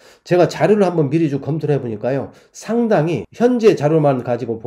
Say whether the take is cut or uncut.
cut